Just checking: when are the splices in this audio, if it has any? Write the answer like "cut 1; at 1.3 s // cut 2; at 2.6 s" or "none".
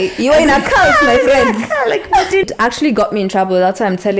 cut 1; at 2.4 s